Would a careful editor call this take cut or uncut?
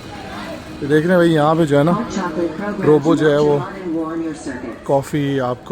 uncut